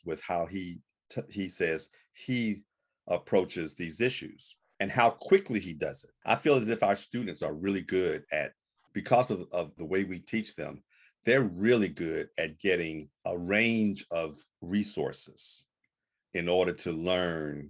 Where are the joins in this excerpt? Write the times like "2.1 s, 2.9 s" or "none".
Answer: none